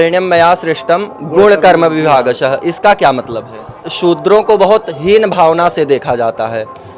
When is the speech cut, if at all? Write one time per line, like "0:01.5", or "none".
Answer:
0:03.9